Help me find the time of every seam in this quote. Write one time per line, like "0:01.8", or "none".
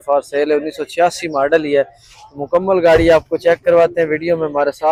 none